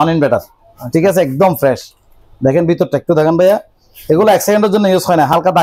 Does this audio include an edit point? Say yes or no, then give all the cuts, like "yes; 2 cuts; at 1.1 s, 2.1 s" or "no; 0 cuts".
no; 0 cuts